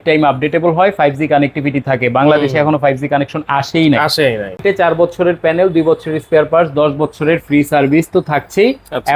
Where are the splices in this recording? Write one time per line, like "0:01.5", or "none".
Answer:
0:04.6